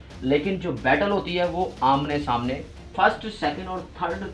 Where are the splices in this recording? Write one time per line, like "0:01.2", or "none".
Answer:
0:02.9